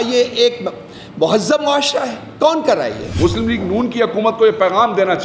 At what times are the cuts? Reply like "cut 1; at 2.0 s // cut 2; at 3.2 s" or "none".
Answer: cut 1; at 3.0 s